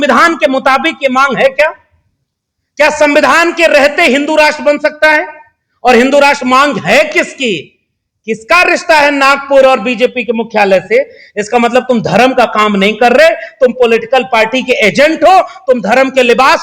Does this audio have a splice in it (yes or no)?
no